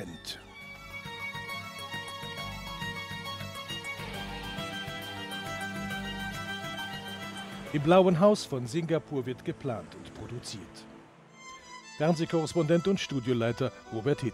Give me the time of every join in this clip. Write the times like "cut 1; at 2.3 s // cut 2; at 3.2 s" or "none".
cut 1; at 13.4 s

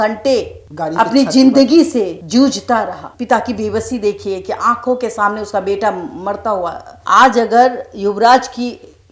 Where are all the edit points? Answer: cut 1; at 3.1 s // cut 2; at 6.9 s

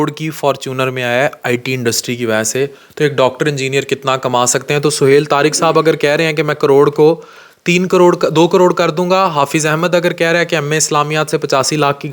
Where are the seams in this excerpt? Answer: none

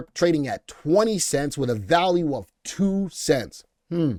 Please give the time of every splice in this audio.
none

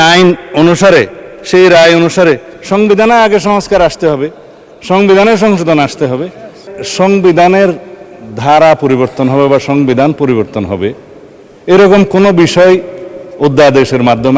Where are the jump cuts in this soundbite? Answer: cut 1; at 6.6 s

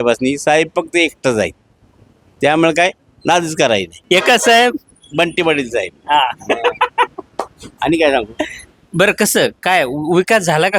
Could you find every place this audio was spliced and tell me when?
none

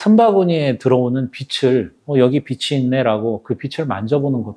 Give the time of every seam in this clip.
cut 1; at 2.0 s

